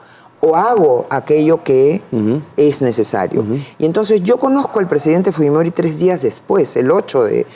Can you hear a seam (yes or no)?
no